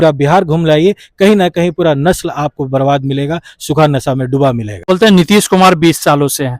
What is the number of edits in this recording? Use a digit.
1